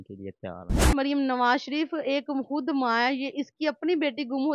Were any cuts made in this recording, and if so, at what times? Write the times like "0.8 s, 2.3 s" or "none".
0.9 s

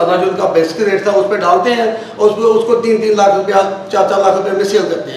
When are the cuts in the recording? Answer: none

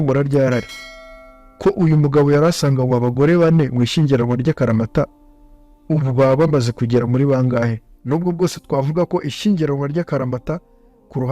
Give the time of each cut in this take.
7.9 s

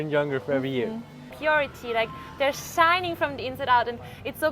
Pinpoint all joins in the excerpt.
1.3 s

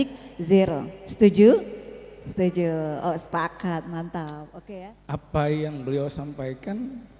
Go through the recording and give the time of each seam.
4.5 s

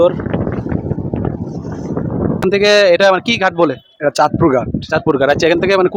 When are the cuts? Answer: 2.4 s

